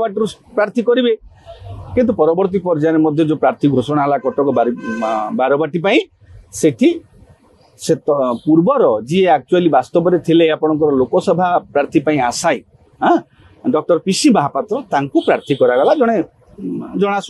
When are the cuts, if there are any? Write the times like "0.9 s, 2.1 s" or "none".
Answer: none

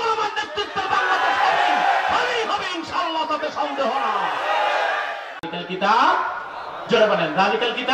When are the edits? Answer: 5.4 s

